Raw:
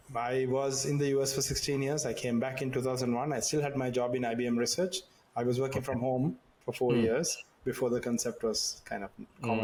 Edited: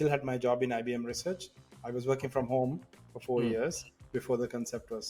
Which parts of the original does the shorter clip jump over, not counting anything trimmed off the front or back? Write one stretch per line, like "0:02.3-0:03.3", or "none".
none

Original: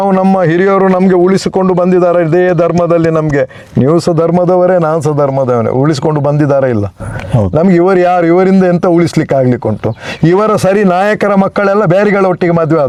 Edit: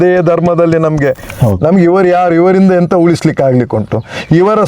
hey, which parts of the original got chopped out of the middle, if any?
0:03.6-0:07.2

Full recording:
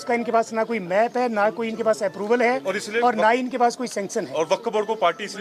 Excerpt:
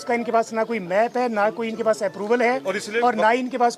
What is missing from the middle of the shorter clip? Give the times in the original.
none

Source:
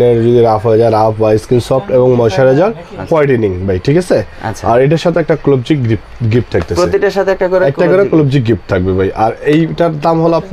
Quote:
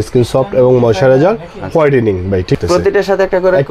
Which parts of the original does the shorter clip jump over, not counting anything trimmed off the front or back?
0:03.9-0:06.6

